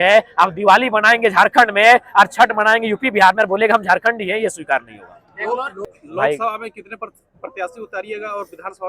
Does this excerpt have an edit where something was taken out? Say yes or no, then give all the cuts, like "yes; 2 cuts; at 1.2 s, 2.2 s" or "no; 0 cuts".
yes; 1 cut; at 5.8 s